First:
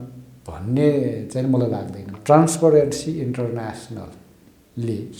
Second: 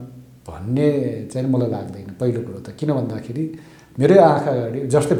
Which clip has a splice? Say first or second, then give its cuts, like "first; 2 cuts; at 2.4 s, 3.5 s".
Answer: first; 1 cut; at 2.0 s